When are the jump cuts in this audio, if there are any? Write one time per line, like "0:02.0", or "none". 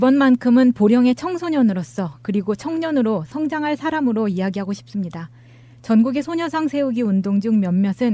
0:03.3